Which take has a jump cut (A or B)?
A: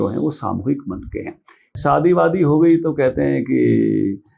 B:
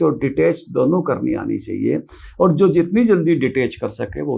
A